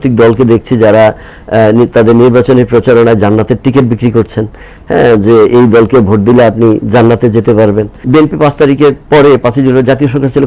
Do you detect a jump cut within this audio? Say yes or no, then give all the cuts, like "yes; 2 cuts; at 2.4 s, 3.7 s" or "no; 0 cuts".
yes; 1 cut; at 8.0 s